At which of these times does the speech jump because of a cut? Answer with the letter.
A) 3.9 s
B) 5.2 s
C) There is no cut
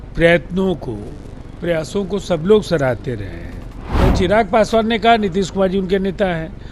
A